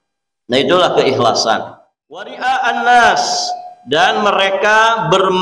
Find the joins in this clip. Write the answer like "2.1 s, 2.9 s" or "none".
2.3 s